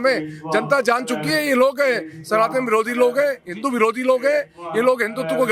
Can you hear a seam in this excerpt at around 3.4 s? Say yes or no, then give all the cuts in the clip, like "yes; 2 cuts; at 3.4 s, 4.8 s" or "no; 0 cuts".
no; 0 cuts